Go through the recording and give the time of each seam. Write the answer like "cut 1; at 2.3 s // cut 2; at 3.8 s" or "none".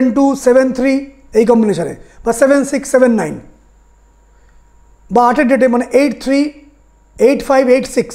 none